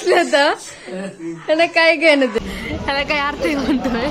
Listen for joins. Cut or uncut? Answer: cut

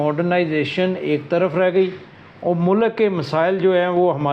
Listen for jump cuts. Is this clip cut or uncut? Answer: uncut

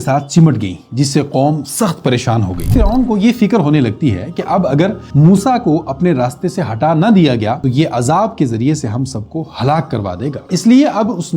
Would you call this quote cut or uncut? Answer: cut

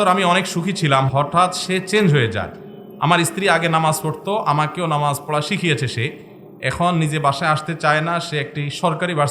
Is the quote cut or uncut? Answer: cut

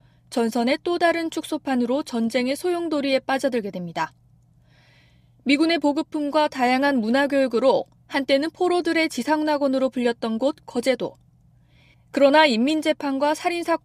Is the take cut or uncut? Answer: cut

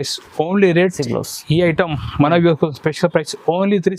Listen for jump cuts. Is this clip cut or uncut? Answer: cut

